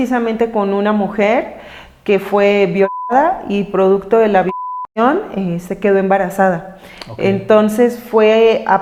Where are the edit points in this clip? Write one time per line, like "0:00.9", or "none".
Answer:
none